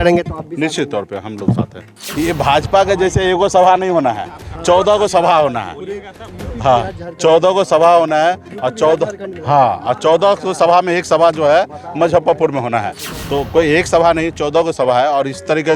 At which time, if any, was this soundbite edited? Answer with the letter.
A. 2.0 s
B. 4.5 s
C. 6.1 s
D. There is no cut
A